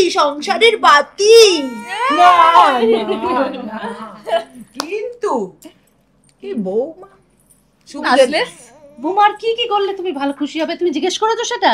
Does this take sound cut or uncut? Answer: uncut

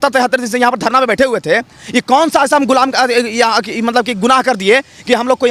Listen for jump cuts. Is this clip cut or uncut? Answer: uncut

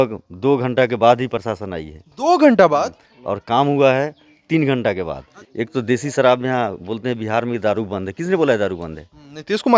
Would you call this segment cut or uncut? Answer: cut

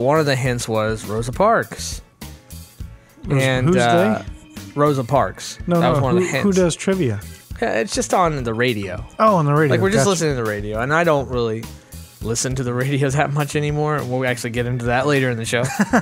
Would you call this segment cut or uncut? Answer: uncut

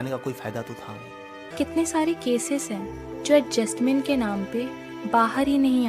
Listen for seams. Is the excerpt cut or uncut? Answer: cut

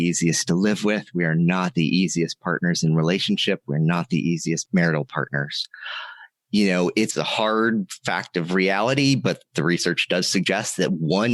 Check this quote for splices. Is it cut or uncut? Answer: cut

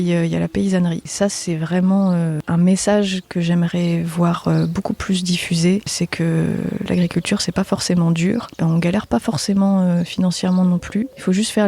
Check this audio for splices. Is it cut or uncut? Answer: cut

